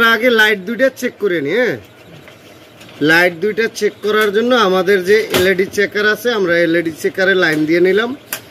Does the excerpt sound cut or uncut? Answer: uncut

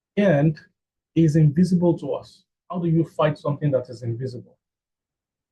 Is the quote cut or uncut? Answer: cut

